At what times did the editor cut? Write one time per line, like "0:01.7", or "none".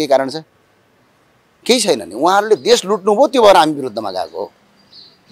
none